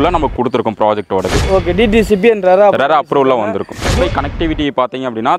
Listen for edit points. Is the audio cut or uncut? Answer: cut